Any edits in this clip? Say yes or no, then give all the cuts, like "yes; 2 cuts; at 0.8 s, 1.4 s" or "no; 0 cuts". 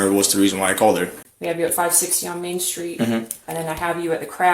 yes; 1 cut; at 1.3 s